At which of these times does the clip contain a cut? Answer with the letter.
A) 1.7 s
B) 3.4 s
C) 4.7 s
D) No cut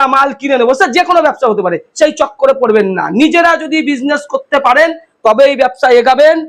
D